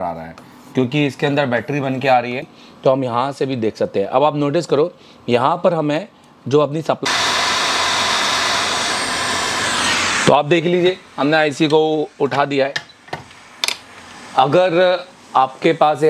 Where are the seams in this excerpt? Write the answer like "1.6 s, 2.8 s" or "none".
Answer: 2.6 s, 7.0 s